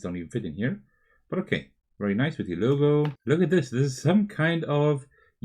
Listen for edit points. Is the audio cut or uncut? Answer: cut